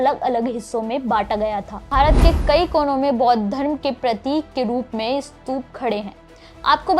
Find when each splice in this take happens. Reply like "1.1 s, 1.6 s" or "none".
1.9 s

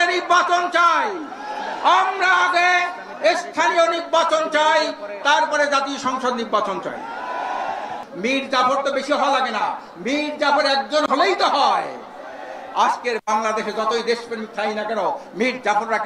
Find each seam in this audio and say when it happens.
8.0 s

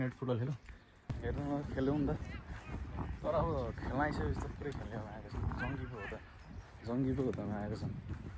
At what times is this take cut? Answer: 1.1 s

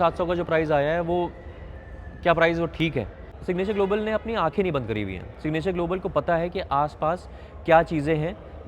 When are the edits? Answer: 3.4 s

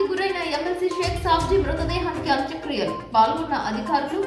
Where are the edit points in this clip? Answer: none

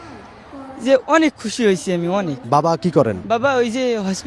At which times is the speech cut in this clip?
2.4 s, 3.2 s

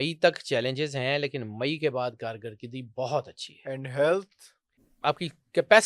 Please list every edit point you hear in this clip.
4.8 s

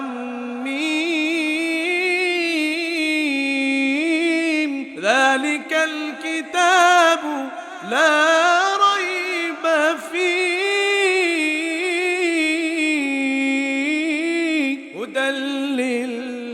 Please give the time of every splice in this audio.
none

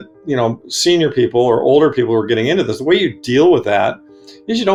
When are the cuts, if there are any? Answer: none

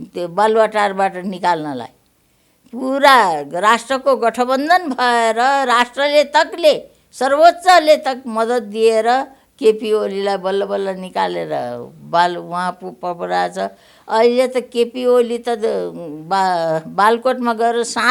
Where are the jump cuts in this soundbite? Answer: none

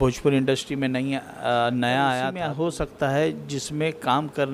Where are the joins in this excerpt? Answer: 2.4 s

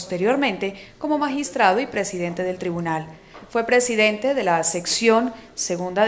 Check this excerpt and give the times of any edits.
none

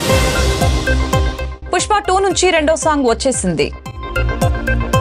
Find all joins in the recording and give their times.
none

